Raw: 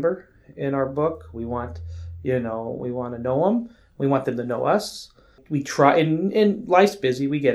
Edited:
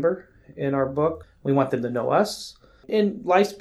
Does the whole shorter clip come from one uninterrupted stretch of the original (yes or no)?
no